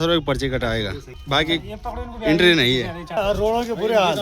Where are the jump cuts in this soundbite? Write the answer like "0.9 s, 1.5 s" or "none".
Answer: 1.1 s, 3.2 s